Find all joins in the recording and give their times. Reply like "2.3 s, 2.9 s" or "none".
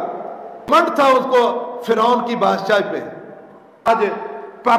0.8 s, 3.9 s